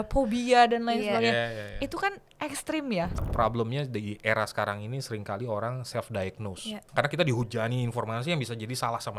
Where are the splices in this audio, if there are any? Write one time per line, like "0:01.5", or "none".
0:03.2
0:06.8